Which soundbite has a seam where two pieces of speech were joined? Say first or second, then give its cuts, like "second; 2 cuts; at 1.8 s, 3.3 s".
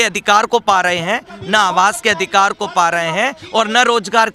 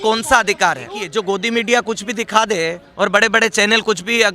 second; 1 cut; at 1.0 s